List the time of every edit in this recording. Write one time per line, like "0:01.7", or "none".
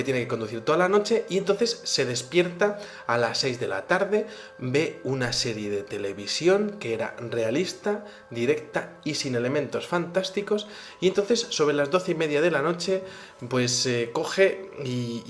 none